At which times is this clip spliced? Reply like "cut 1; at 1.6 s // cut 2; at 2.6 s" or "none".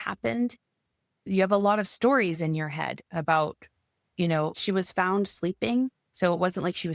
cut 1; at 1.3 s // cut 2; at 4.6 s